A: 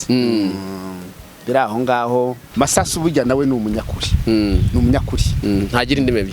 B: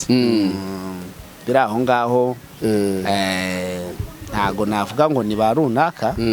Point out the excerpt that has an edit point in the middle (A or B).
A